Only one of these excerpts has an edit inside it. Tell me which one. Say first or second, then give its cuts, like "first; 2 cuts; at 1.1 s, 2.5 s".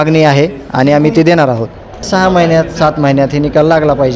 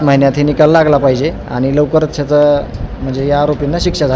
first; 1 cut; at 2.1 s